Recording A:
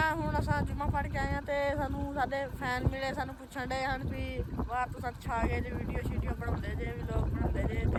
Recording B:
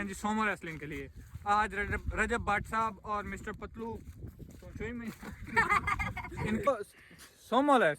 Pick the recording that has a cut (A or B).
B